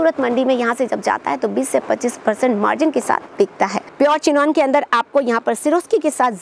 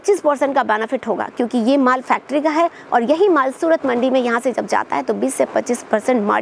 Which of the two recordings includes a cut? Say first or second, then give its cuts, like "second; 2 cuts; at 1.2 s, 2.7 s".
first; 1 cut; at 3.8 s